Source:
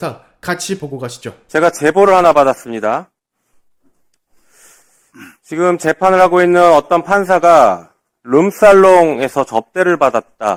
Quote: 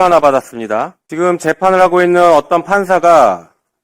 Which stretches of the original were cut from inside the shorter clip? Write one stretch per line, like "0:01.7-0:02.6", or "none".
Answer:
0:03.1-0:05.4